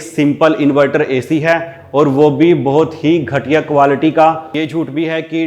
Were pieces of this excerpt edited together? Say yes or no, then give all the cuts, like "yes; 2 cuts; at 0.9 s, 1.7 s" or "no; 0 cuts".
yes; 1 cut; at 4.5 s